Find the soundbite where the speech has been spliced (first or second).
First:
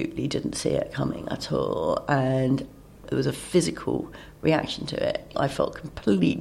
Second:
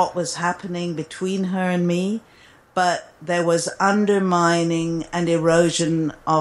first